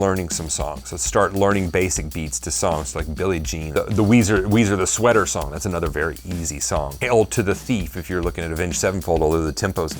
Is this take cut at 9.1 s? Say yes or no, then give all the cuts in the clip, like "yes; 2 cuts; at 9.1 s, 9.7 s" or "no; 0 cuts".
no; 2 cuts; at 3.7 s, 7.0 s